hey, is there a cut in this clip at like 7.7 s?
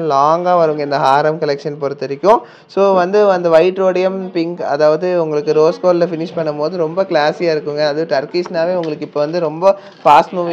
no; 0 cuts

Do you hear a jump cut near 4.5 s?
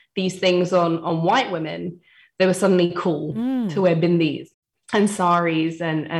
yes; 1 cut; at 4.5 s

